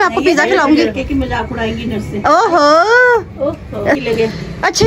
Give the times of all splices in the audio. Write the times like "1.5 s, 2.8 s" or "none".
0.9 s, 4.0 s